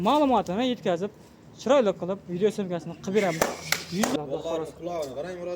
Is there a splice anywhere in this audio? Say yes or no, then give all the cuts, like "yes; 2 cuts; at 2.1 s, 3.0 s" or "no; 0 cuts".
yes; 1 cut; at 4.1 s